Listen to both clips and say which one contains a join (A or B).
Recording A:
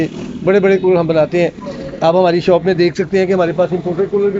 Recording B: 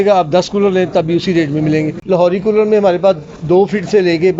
B